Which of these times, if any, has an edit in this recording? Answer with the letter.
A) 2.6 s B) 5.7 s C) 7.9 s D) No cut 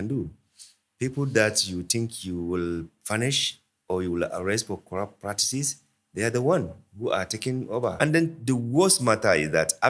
C